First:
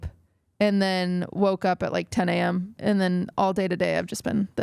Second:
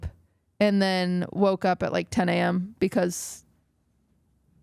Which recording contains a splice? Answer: first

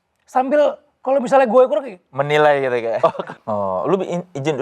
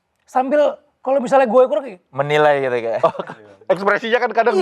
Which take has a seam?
first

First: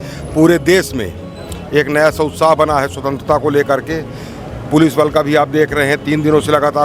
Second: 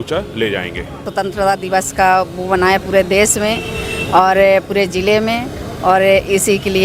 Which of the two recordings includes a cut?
second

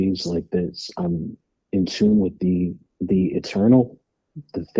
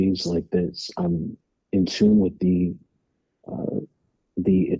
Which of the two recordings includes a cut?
first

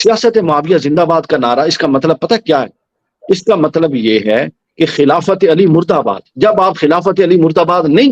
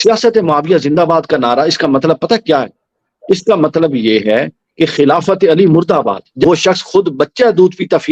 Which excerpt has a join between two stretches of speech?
second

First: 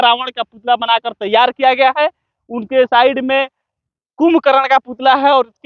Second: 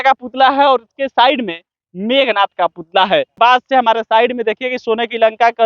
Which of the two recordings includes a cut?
second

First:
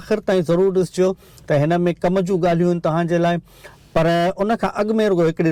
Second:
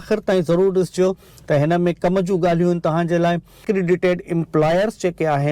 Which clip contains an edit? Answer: second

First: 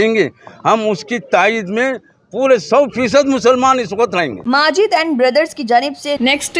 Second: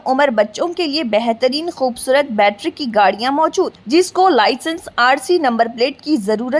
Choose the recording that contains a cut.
first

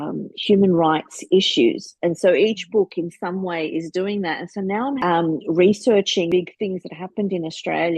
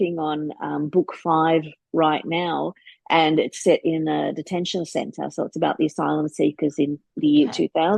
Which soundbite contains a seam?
first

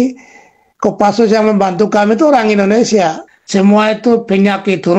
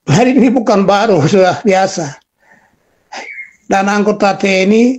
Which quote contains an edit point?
first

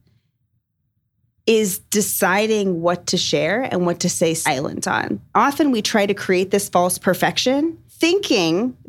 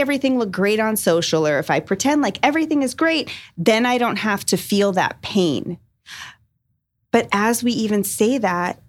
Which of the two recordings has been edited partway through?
first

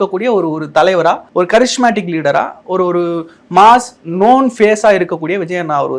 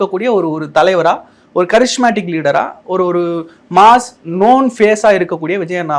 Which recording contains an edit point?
first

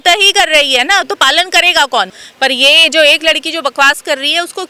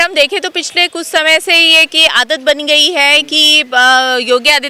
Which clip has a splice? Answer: first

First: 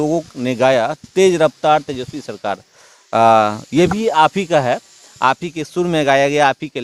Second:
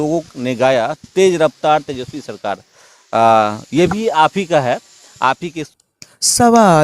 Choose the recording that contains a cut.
second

